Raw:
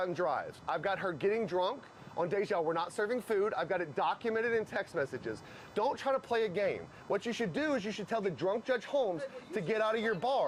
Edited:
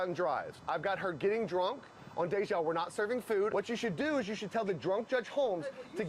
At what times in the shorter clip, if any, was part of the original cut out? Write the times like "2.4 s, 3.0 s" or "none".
3.5 s